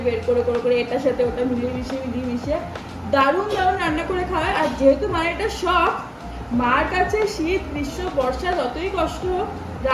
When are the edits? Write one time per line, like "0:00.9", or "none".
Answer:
none